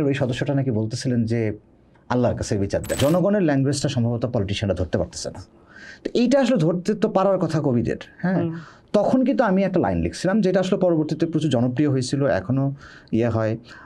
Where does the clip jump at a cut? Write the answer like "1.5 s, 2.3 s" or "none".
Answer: 3.0 s